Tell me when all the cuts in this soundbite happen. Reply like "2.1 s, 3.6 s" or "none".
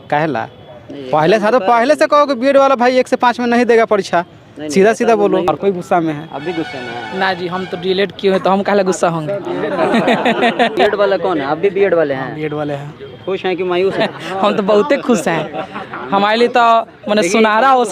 5.5 s, 10.8 s, 14.0 s